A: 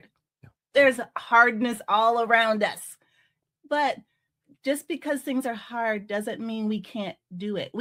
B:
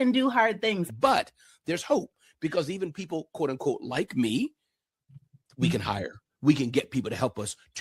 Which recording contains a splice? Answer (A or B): B